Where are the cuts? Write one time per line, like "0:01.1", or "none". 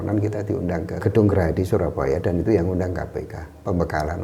0:01.0